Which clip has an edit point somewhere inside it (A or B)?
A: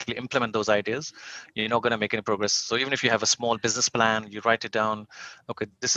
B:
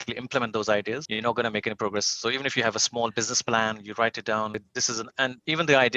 B